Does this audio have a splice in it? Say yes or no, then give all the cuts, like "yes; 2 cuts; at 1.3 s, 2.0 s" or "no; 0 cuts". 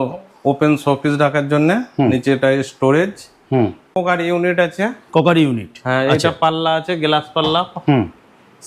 yes; 1 cut; at 4.0 s